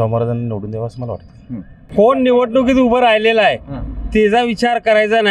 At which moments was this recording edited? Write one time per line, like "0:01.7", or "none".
0:01.8